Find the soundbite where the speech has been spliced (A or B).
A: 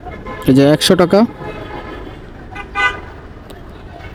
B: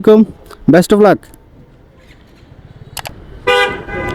B